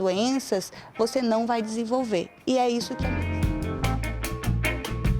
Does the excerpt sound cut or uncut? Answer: cut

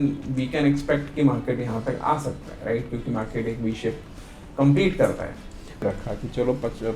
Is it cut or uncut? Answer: cut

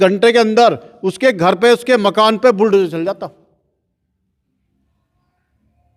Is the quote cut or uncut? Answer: uncut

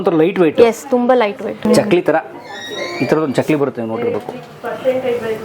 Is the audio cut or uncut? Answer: uncut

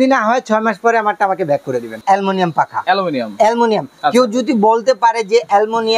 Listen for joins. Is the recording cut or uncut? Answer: cut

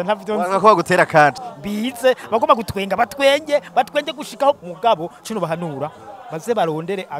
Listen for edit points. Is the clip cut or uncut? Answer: cut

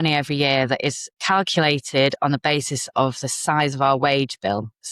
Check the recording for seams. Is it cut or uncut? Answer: cut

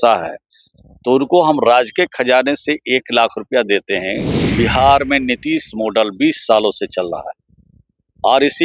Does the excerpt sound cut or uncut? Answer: cut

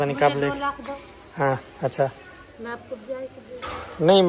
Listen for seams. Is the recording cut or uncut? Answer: uncut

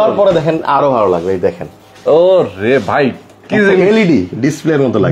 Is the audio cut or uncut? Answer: uncut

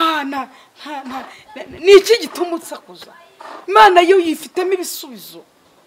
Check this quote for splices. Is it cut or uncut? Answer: uncut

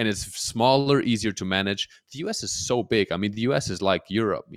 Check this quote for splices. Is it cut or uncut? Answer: uncut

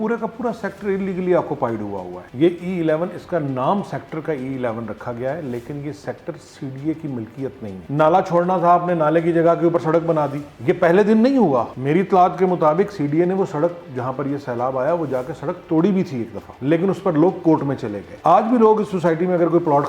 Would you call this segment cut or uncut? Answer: cut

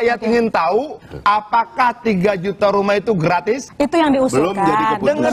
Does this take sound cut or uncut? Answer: cut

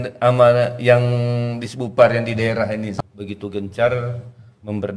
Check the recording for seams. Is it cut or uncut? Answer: cut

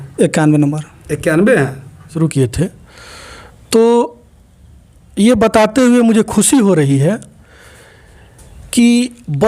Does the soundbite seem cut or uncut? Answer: cut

